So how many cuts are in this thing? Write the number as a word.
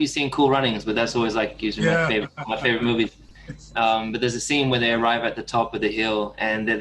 zero